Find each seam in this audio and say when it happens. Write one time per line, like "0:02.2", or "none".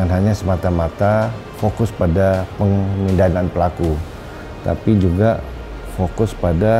0:01.4